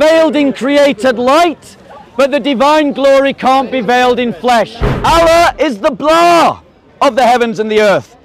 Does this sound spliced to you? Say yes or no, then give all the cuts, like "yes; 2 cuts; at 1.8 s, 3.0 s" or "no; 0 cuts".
yes; 1 cut; at 4.8 s